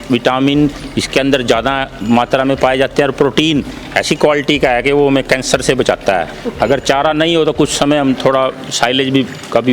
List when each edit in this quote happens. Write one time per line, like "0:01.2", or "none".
0:06.4